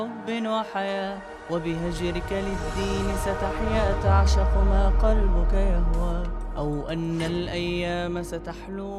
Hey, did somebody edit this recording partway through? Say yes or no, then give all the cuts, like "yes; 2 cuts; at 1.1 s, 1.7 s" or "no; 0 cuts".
no; 0 cuts